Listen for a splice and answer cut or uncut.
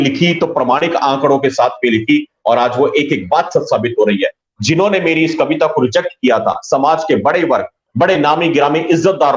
uncut